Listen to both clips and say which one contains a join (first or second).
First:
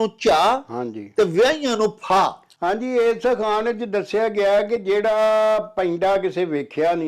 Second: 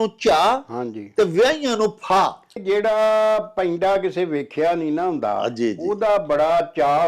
second